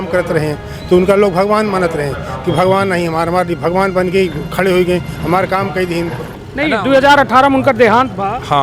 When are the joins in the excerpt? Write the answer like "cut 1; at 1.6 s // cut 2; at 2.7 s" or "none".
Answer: cut 1; at 6.3 s